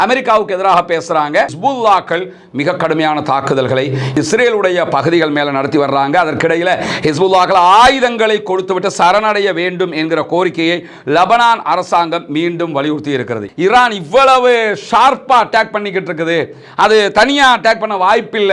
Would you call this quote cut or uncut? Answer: cut